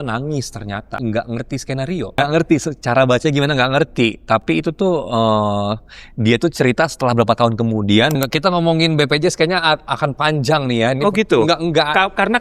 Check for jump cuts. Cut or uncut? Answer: cut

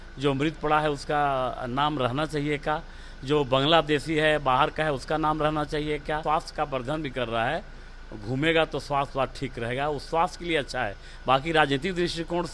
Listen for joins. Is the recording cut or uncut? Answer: cut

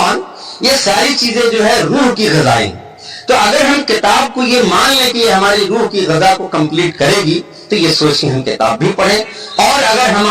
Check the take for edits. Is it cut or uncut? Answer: uncut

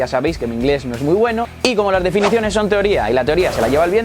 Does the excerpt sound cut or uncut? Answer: cut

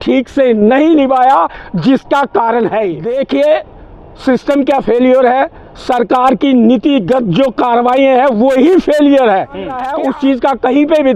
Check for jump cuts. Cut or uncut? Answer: cut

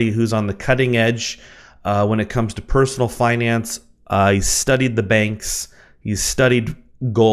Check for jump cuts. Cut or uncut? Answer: cut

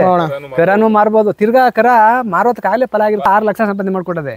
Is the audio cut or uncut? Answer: cut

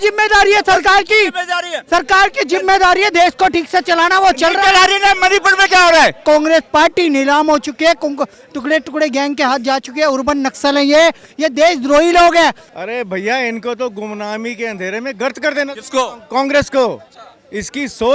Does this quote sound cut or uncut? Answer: cut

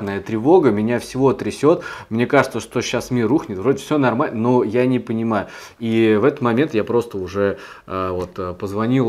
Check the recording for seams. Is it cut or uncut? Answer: uncut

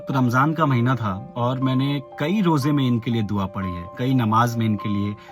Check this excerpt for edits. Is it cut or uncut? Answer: cut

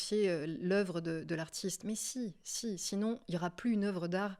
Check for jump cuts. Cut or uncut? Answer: uncut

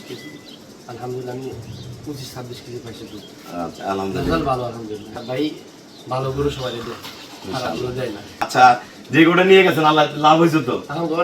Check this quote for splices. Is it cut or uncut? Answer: cut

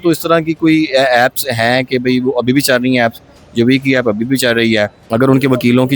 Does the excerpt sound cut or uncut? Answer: cut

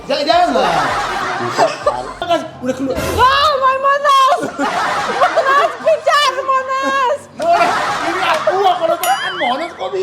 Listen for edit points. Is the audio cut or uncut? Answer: cut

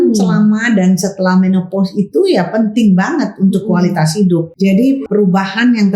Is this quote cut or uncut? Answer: cut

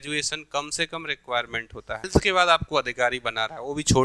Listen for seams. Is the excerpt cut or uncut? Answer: cut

